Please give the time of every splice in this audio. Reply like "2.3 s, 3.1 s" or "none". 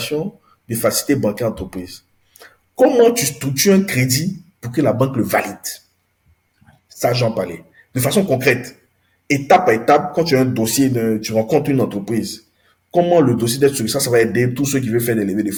none